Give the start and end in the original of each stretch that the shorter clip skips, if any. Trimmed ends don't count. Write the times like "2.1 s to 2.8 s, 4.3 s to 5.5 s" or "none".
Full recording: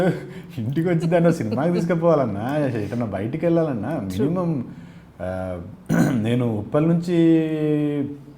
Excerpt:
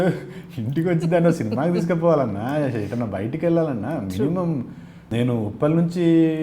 5.1 s to 6.2 s